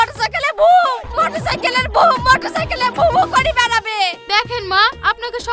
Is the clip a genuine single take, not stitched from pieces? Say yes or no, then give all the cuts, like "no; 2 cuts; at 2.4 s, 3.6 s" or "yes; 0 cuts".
yes; 0 cuts